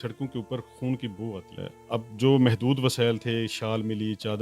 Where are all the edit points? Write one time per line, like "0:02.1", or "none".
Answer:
0:01.5